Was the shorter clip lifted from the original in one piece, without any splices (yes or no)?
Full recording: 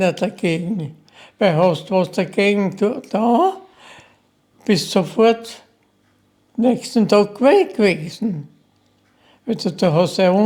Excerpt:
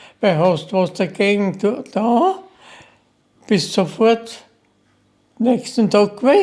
yes